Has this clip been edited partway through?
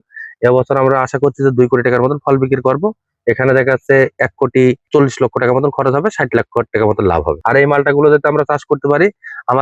yes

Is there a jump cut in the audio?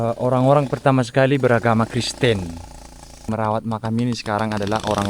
yes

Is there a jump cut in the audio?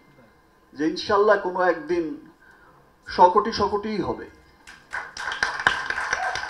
no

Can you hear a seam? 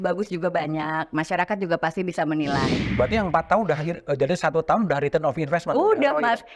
yes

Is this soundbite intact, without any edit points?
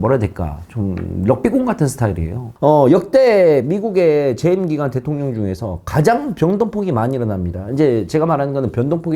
no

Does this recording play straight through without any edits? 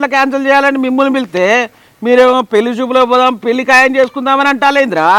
yes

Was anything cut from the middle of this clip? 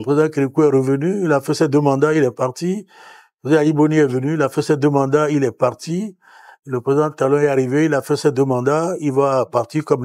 no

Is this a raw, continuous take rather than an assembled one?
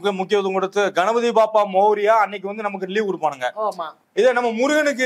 no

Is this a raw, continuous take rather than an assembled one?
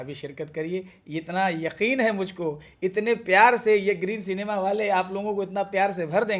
yes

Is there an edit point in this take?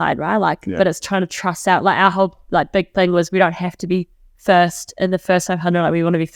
no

